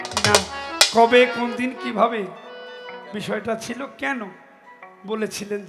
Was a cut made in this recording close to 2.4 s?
no; 0 cuts

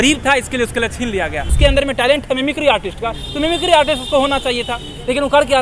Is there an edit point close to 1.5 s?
yes; 1 cut; at 1.5 s

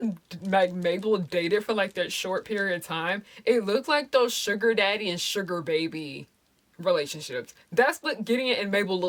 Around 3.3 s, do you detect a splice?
no; 0 cuts

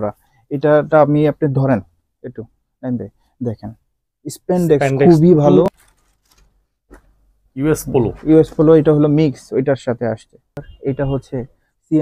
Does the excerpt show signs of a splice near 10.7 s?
yes; 2 cuts; at 5.7 s, 10.7 s

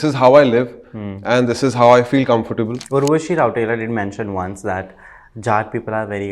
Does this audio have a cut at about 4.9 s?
no; 1 cut; at 2.8 s

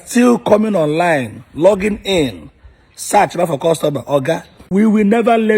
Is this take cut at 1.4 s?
no; 1 cut; at 4.5 s

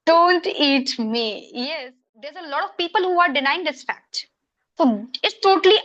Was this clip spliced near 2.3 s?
yes; 1 cut; at 2.3 s

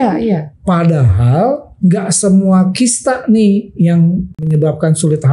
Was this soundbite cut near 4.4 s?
yes; 1 cut; at 4.4 s

